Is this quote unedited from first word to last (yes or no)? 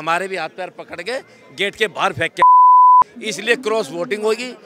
yes